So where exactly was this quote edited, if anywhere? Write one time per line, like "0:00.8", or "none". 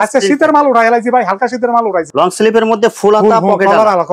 0:02.1